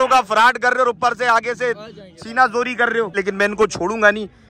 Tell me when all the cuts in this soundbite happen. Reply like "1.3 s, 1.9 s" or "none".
3.1 s